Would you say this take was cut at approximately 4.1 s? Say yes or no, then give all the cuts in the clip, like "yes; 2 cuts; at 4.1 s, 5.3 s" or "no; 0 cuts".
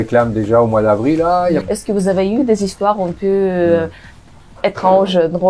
no; 1 cut; at 1.6 s